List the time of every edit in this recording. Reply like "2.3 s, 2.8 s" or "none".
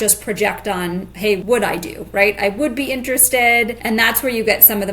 1.4 s, 3.8 s